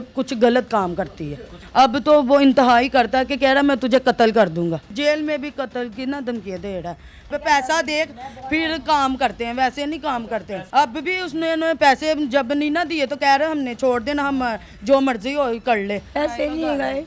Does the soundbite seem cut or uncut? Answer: cut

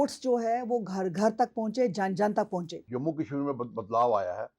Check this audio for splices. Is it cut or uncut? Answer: cut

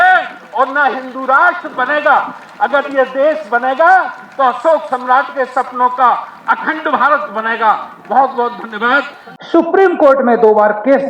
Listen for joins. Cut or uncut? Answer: uncut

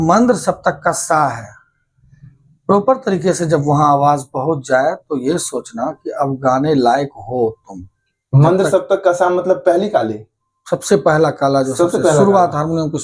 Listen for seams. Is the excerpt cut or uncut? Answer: uncut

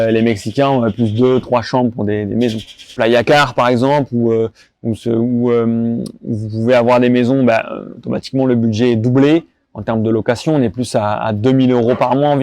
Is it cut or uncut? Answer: cut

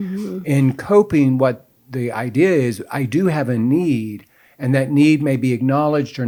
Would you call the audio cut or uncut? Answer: uncut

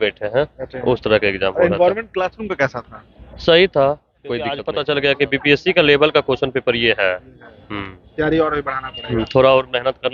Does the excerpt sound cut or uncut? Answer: cut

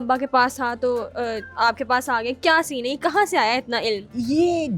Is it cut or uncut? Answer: uncut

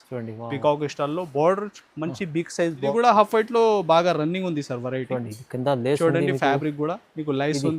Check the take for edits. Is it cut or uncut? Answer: cut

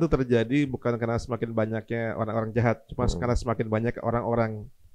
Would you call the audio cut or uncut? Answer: uncut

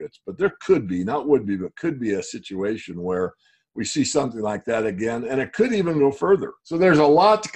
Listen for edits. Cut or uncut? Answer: cut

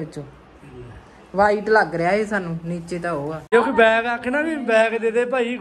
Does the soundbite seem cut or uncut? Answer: cut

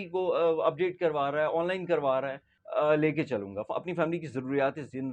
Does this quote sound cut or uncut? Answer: cut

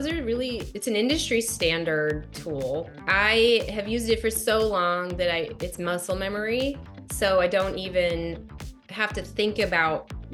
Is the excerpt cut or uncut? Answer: uncut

